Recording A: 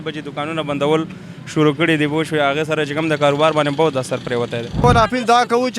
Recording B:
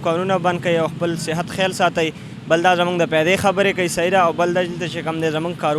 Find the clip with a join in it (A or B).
A